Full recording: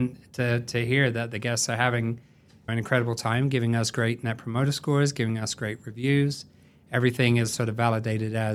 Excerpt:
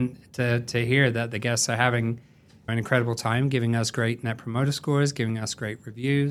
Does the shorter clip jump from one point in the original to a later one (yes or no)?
no